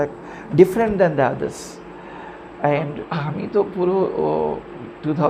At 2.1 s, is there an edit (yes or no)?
no